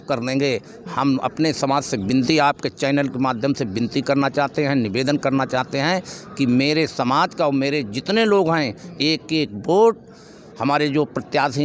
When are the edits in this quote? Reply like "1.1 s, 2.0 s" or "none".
none